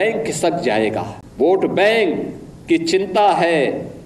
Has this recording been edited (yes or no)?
yes